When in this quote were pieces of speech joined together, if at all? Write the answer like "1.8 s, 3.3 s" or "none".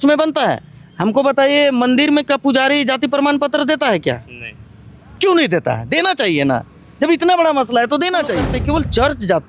8.6 s